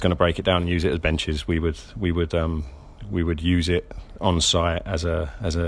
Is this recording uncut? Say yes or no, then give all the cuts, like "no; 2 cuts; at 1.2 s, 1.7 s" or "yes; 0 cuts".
yes; 0 cuts